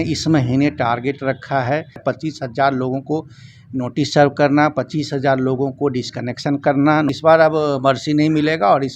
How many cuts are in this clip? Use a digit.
2